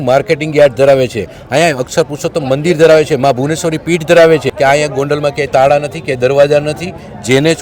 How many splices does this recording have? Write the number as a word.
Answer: one